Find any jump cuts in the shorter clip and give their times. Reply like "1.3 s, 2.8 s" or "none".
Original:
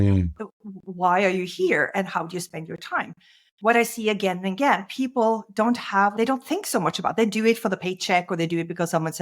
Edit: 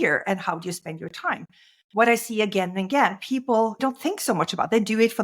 3.8 s